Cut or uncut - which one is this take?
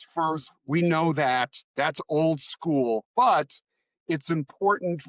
cut